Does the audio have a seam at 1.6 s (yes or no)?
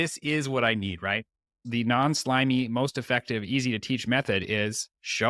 yes